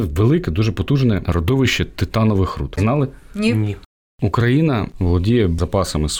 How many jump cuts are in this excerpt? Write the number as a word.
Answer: four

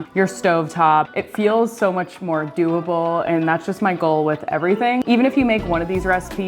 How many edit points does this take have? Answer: two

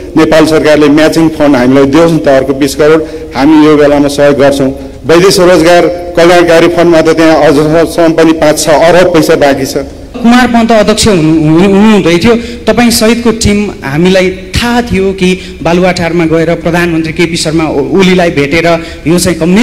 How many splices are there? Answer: one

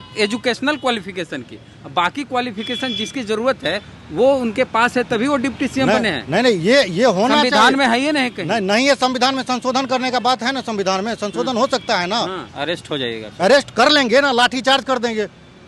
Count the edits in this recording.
one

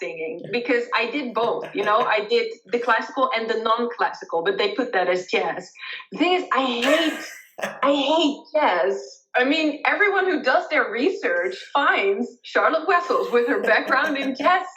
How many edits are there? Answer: one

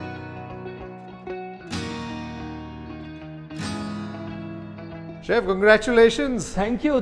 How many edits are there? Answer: one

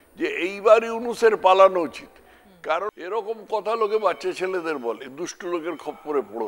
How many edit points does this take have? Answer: one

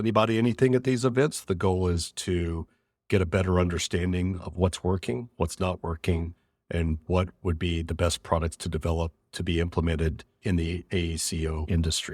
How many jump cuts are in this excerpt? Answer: one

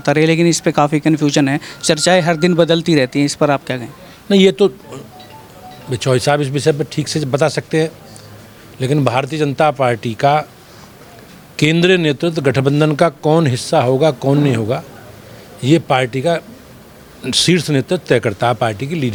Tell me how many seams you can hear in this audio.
zero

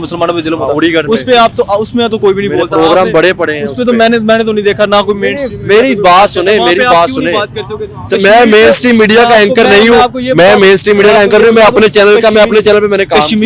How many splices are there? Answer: zero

